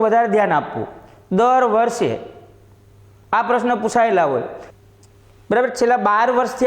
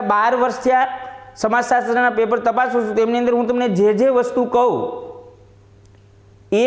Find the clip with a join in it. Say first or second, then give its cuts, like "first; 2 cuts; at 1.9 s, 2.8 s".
first; 1 cut; at 4.6 s